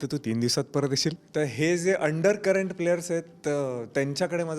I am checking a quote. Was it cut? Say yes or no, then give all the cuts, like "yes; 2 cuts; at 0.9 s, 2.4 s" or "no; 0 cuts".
yes; 1 cut; at 1.2 s